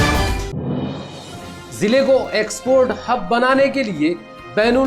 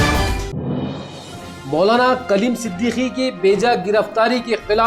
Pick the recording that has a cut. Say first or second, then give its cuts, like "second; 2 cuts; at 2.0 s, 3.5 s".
first; 1 cut; at 1.5 s